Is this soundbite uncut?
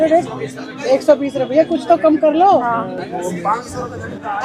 yes; 0 cuts

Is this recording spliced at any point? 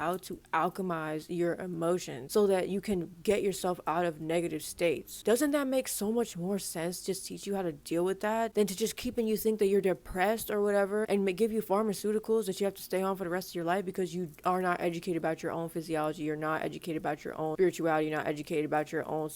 no; 0 cuts

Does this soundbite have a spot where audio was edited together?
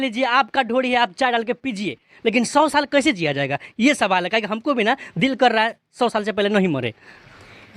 no; 0 cuts

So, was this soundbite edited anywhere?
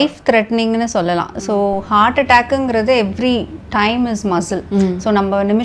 no; 0 cuts

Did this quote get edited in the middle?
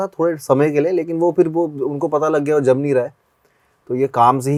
no; 0 cuts

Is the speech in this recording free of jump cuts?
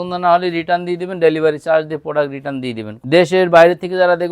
no; 1 cut; at 3.0 s

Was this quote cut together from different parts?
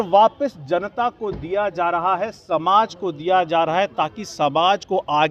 no; 0 cuts

